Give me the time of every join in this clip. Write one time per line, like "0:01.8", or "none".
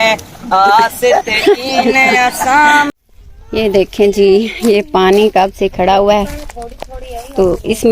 0:02.9